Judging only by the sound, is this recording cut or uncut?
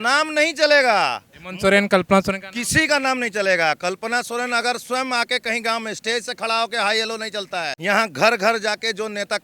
cut